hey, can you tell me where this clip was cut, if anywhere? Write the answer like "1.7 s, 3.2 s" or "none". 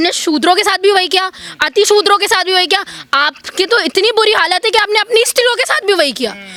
none